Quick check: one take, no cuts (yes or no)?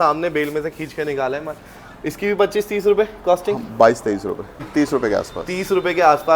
no